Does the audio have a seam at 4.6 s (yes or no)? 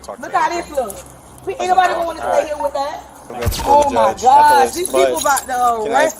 no